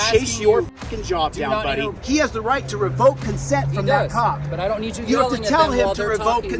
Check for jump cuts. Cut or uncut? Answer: cut